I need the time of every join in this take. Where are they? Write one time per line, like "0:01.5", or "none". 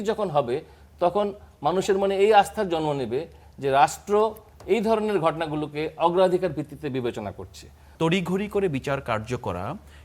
0:07.8

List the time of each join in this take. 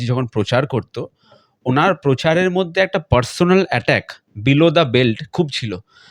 none

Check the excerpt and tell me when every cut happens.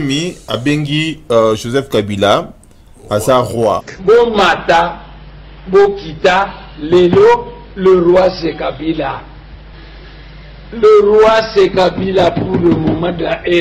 none

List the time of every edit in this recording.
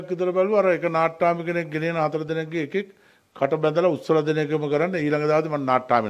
none

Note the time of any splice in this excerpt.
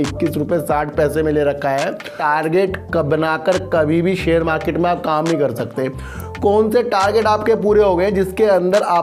0:02.1

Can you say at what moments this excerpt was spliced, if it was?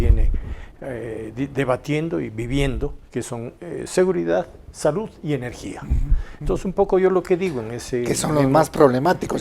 none

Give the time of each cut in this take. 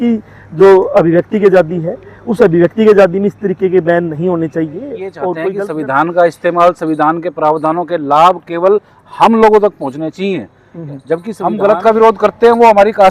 0:05.6
0:11.3

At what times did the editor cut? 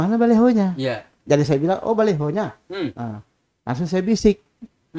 none

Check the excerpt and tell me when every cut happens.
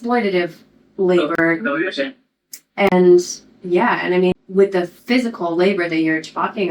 0:04.3

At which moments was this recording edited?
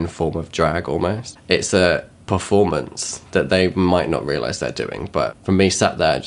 0:01.3
0:02.1
0:05.4

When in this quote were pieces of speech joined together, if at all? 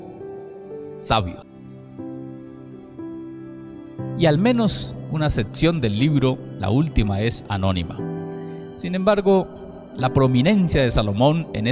0:01.5

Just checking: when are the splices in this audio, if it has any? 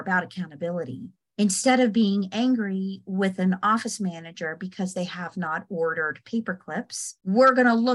0:01.2
0:07.0

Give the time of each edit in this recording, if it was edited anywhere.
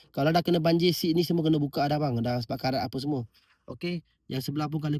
none

